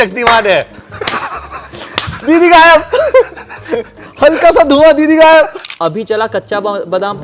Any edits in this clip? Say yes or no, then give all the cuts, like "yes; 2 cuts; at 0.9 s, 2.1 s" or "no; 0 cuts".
yes; 1 cut; at 5.6 s